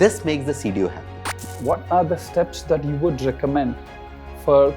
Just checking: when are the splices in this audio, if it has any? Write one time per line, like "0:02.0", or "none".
0:01.5